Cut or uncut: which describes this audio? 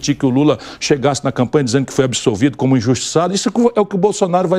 uncut